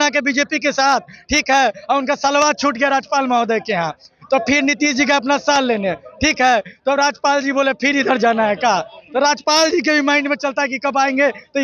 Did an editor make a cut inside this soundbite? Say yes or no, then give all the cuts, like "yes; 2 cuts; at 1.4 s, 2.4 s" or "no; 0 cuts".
no; 0 cuts